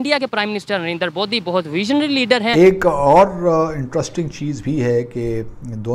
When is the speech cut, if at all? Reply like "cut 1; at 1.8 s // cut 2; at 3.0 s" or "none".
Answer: cut 1; at 2.5 s